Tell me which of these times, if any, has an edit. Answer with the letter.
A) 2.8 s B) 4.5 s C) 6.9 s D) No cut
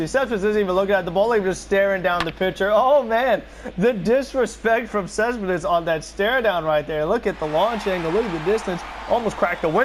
D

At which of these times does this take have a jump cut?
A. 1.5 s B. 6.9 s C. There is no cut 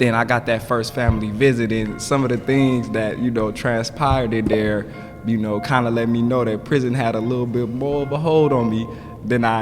C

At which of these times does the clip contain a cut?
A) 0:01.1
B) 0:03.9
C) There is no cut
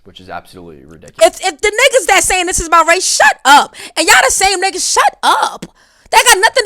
A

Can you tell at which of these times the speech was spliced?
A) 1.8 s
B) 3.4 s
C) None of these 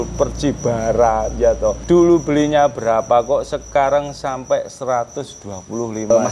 A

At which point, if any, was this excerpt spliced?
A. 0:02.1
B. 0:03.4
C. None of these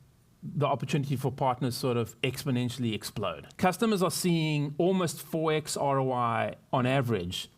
B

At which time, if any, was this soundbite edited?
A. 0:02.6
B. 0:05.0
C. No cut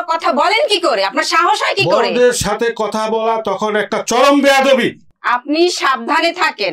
C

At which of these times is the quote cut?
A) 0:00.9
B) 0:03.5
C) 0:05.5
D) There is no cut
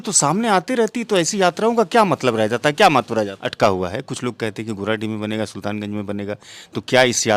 B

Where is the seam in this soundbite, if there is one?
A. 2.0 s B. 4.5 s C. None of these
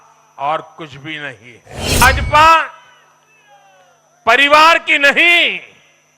A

